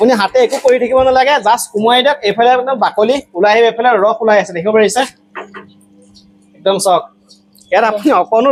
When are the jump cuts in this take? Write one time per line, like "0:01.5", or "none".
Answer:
none